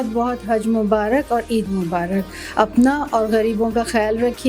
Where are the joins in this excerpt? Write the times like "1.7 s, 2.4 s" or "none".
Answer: none